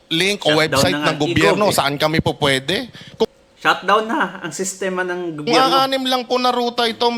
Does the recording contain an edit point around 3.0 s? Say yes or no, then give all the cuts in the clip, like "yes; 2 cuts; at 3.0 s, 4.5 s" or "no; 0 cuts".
no; 0 cuts